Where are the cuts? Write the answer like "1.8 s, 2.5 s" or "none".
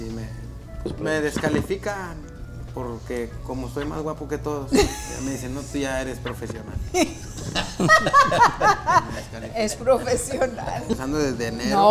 0.9 s, 10.9 s